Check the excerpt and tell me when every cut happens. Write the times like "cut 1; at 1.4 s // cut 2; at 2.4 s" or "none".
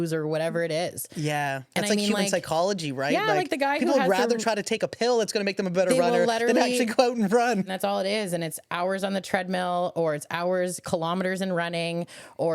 cut 1; at 7.6 s